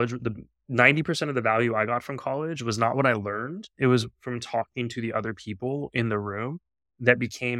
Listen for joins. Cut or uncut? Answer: uncut